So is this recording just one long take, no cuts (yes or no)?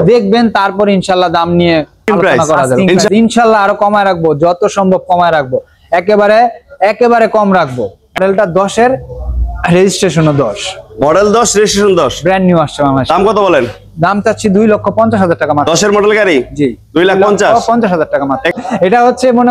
no